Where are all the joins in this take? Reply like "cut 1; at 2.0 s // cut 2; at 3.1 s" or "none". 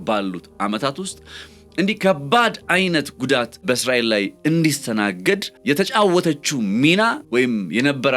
cut 1; at 3.6 s // cut 2; at 5.5 s // cut 3; at 7.2 s

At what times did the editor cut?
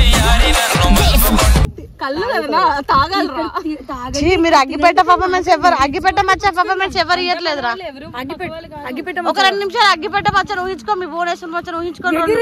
none

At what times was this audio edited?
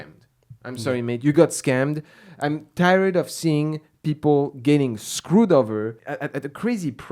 cut 1; at 6.0 s

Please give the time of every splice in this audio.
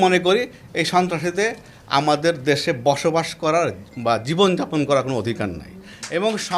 cut 1; at 2.0 s

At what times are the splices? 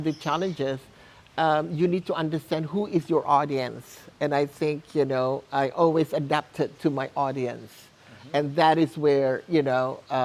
none

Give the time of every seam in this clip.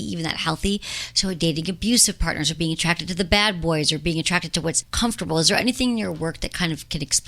cut 1; at 4.9 s

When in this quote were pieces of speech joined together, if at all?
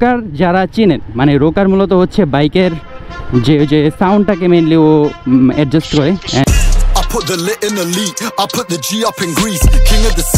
cut 1; at 6.5 s

